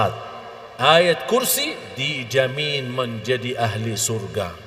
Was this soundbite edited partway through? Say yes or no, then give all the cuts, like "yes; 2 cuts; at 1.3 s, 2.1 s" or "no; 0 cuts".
no; 0 cuts